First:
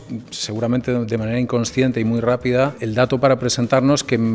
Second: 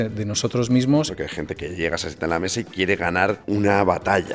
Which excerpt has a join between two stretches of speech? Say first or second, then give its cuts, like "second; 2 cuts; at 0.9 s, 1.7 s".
second; 2 cuts; at 1.1 s, 3.4 s